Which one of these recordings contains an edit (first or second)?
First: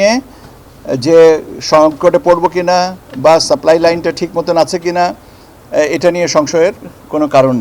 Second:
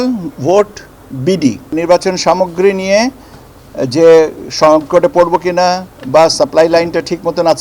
second